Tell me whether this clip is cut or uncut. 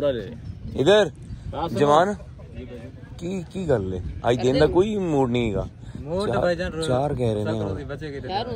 uncut